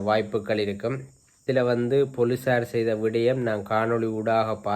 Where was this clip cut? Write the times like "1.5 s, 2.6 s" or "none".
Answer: 1.4 s